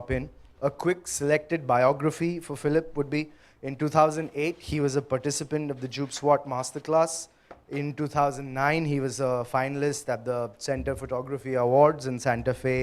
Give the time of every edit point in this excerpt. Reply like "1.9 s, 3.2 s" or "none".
2.5 s